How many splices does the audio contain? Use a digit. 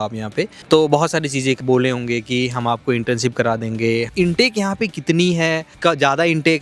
2